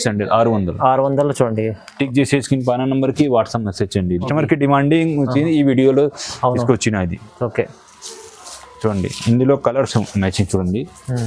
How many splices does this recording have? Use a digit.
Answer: 1